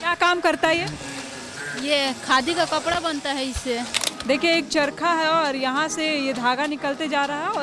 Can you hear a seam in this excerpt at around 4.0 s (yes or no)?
yes